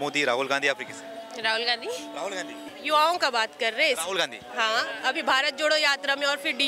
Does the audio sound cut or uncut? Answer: cut